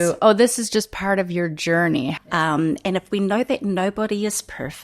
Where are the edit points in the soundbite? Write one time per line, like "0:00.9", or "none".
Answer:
0:02.1

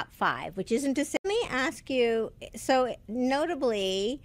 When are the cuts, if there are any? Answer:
0:01.2

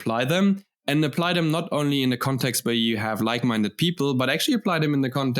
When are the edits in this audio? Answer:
none

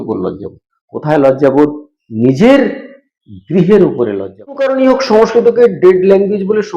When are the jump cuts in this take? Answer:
0:04.6

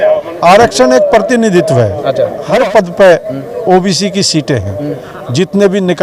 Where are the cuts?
0:02.4

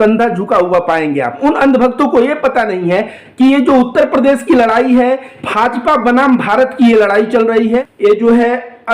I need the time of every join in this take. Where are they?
0:01.4
0:05.3
0:07.9

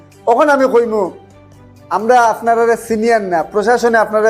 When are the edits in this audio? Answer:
none

